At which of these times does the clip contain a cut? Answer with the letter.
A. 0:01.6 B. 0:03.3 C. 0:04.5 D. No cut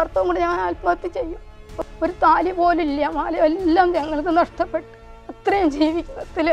A